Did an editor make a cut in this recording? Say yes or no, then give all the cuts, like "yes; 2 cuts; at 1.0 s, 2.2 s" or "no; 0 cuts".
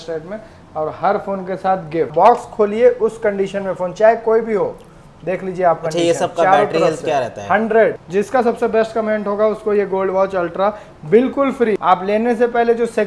yes; 3 cuts; at 2.1 s, 7.9 s, 11.8 s